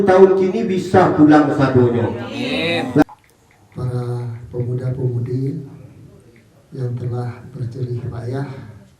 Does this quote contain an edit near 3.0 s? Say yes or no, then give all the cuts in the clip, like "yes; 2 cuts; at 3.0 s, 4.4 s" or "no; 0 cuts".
yes; 1 cut; at 3.0 s